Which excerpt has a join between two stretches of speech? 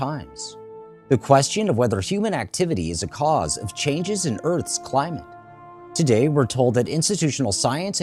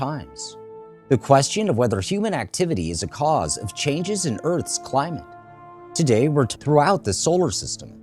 first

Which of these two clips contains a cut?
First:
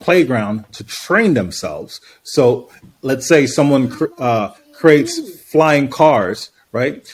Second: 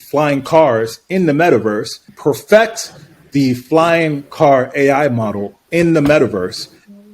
second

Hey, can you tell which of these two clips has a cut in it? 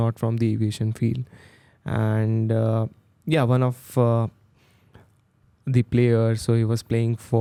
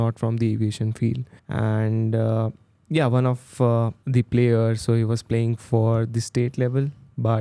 second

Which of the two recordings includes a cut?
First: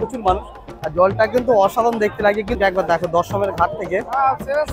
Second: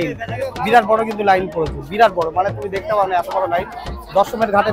first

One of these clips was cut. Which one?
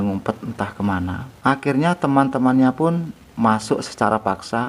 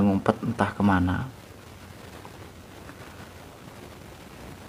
first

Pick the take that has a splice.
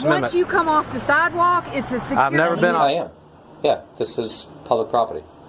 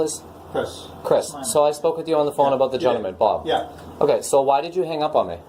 first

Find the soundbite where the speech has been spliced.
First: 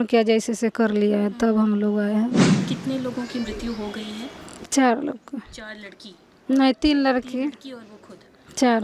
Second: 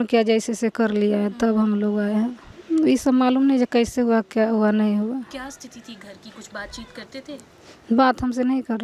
first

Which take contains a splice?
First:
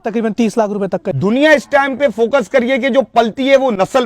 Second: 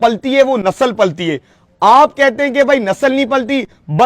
first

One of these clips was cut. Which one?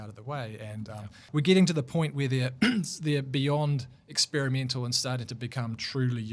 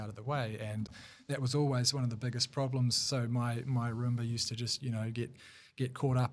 first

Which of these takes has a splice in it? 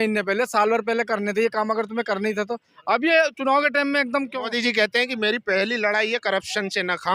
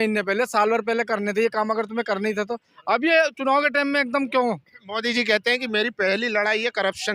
first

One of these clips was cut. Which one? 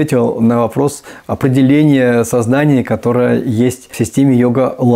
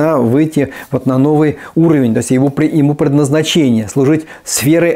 first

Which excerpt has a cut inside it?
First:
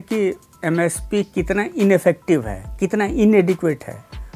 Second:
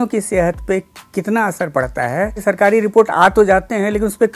second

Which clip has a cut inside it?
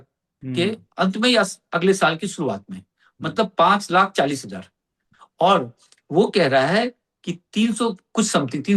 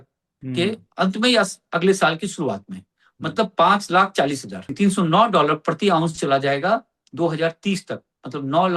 second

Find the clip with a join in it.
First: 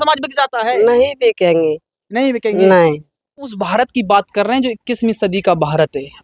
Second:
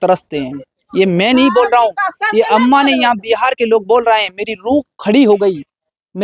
first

